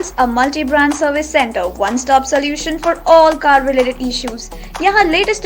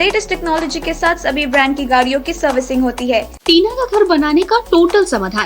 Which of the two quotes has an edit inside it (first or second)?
second